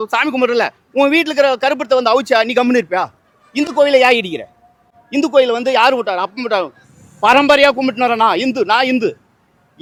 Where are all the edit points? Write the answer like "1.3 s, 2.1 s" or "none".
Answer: none